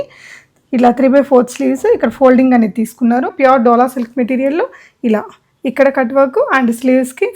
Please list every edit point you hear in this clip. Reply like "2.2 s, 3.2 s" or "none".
3.3 s